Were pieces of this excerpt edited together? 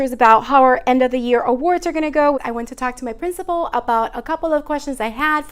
yes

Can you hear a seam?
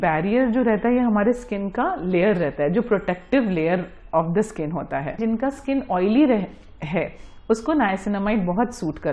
yes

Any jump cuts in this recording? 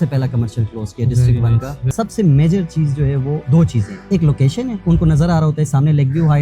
yes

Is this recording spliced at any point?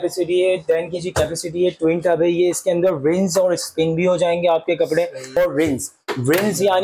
yes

